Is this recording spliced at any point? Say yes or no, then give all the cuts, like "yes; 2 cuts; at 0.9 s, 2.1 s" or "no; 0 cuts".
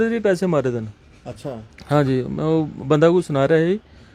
no; 0 cuts